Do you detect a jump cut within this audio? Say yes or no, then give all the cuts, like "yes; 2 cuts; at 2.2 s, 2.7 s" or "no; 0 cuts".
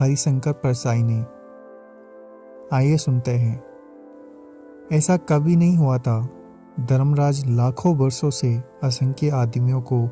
yes; 2 cuts; at 1.3 s, 2.7 s